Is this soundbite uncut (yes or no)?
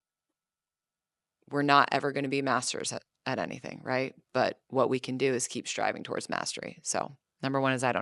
yes